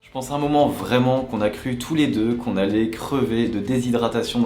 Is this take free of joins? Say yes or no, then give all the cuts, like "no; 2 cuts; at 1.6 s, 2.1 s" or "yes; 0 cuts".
yes; 0 cuts